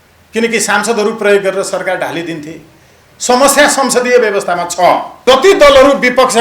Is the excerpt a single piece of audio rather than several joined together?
no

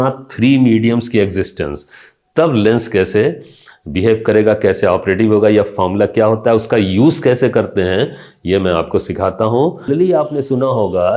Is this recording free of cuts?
no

